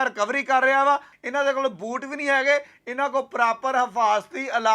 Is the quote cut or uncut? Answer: cut